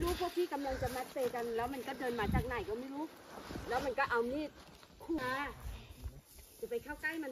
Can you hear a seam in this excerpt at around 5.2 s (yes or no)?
yes